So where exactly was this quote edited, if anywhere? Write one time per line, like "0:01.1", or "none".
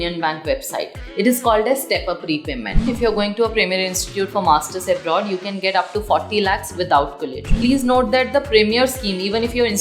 0:02.9
0:07.5